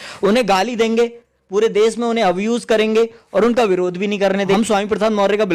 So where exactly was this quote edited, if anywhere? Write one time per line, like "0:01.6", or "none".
0:04.5